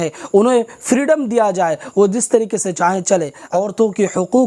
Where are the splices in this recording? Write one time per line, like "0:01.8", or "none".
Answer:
0:03.4